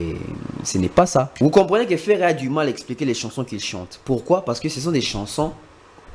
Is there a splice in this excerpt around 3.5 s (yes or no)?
no